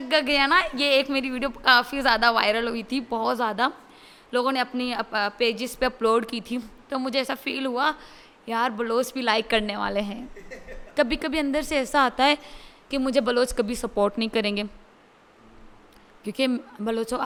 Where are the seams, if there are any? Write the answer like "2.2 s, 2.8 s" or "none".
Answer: none

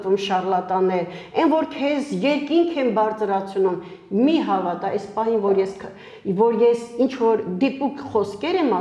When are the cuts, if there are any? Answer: none

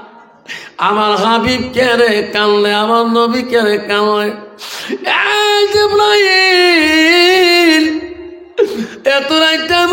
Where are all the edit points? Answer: none

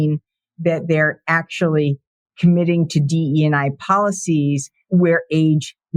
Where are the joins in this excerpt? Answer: 4.7 s

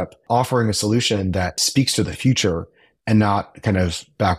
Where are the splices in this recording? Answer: 1.6 s

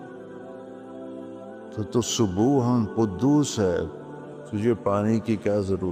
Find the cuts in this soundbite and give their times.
none

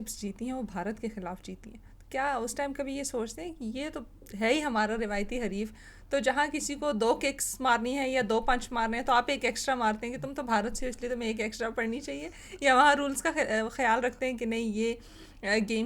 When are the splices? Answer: none

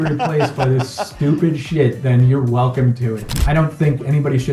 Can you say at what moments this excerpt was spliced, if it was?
3.4 s

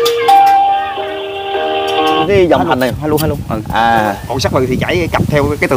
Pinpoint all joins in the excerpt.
2.2 s

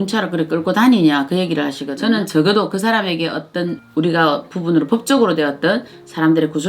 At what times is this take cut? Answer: 1.8 s, 3.8 s

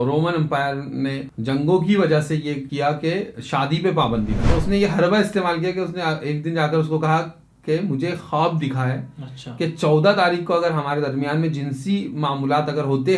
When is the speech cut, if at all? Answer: 1.3 s, 2.7 s, 4.4 s

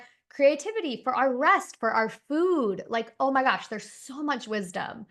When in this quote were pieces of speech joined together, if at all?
none

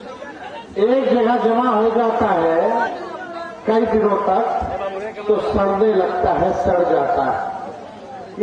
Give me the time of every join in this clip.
none

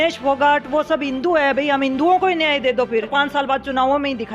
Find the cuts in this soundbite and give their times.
3.1 s

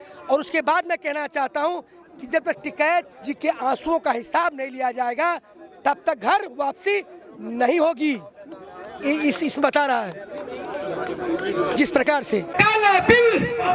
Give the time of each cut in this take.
12.5 s

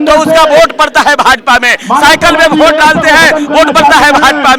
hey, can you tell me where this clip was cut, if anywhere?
none

